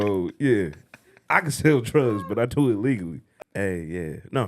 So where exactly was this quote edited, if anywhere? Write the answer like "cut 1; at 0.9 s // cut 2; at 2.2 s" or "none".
cut 1; at 3.2 s